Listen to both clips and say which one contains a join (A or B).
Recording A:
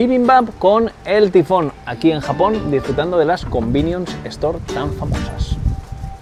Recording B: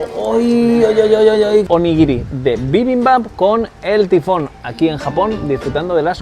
B